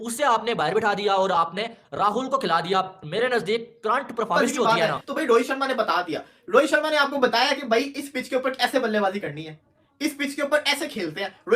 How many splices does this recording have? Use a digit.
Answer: 1